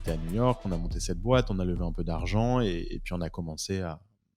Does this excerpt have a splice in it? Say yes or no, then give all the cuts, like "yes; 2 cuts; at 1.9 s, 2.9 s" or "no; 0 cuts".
no; 0 cuts